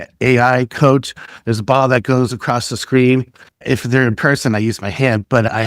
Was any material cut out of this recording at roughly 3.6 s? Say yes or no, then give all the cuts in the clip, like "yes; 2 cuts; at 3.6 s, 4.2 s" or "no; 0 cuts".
yes; 1 cut; at 3.6 s